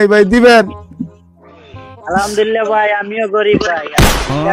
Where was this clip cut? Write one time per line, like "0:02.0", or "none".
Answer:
none